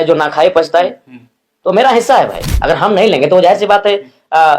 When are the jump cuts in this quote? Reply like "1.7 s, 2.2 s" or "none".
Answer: 2.5 s